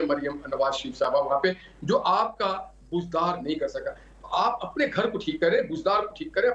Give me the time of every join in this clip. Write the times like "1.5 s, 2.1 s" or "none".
none